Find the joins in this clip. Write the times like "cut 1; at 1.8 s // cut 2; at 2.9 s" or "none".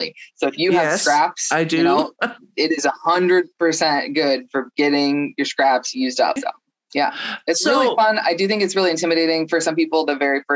cut 1; at 6.4 s